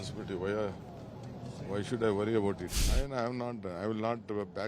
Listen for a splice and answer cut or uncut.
cut